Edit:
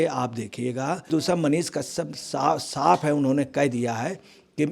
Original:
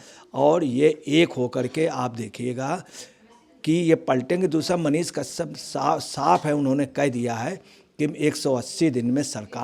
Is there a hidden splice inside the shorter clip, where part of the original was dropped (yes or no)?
yes